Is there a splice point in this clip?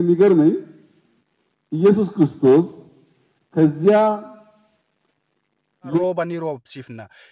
yes; 1 cut; at 6.0 s

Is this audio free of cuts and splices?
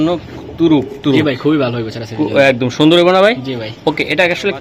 yes; 0 cuts

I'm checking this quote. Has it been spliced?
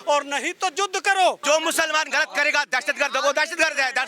yes; 1 cut; at 1.4 s

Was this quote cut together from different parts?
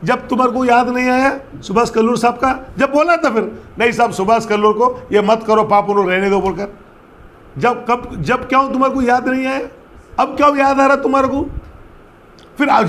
no; 0 cuts

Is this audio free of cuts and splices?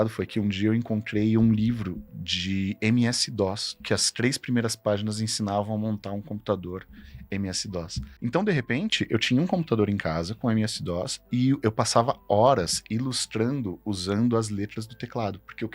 no; 1 cut; at 8.0 s

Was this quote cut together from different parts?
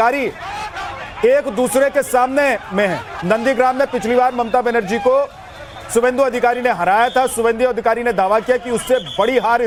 no; 0 cuts

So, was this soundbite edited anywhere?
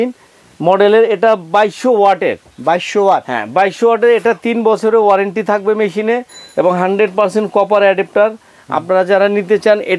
no; 0 cuts

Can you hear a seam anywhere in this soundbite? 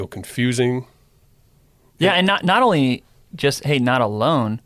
no; 0 cuts

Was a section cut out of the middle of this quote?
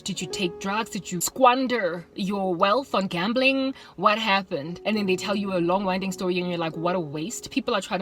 yes; 2 cuts; at 1.3 s, 4.7 s

